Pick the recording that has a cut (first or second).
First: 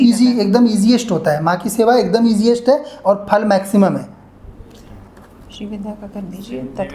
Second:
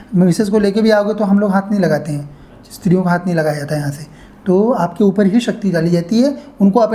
first